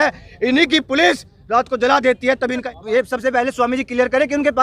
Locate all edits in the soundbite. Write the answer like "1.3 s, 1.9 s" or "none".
2.6 s